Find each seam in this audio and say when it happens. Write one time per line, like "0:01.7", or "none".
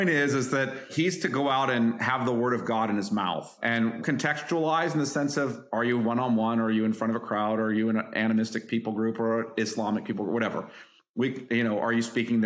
0:00.8
0:02.0
0:04.0